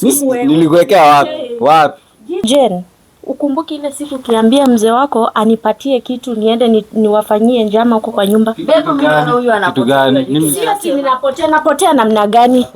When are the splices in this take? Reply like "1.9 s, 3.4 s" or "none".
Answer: 2.4 s